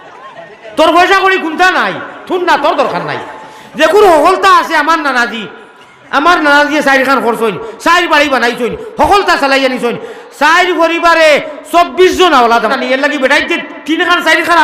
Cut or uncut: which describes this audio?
cut